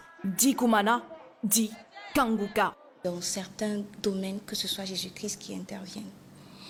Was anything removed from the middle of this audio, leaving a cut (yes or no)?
no